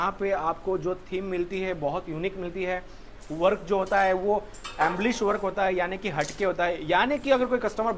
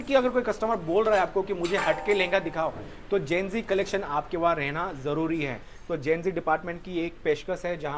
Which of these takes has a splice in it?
second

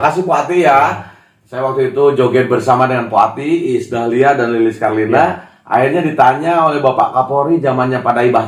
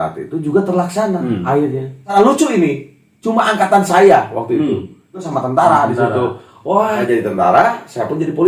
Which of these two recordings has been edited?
second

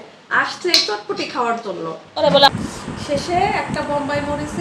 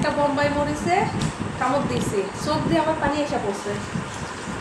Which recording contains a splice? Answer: first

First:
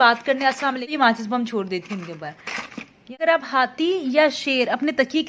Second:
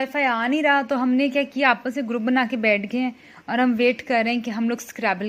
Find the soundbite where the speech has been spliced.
first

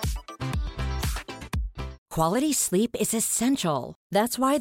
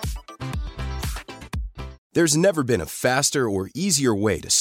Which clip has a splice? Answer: second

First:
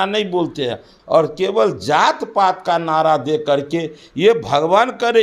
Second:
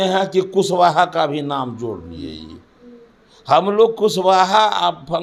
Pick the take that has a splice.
first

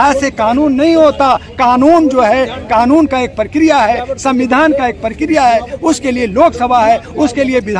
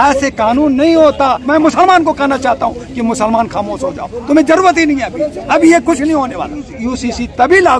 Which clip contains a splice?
second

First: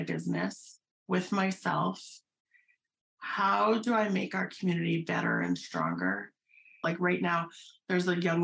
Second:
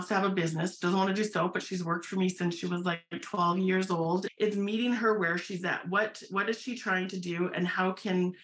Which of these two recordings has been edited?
first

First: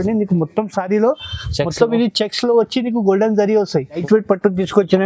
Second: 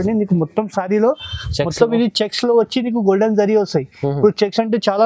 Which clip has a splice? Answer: first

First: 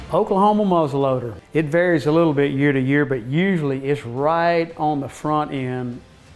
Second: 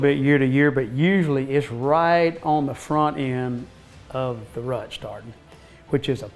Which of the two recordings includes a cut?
first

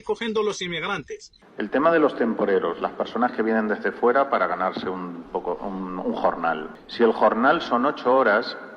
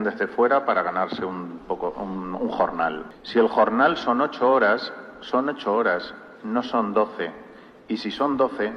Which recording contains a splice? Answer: first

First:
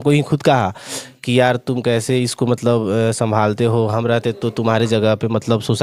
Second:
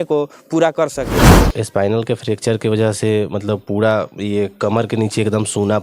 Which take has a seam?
second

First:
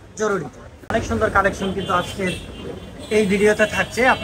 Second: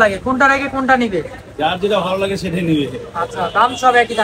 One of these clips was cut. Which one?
first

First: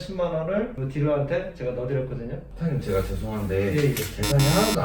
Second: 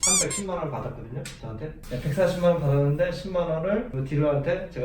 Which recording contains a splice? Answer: second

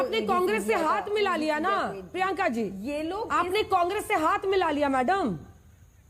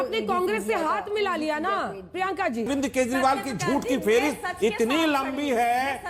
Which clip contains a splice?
second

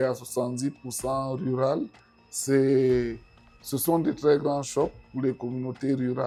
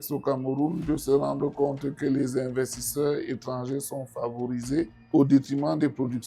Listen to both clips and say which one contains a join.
second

